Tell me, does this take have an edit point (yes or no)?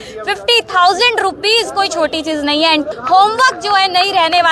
yes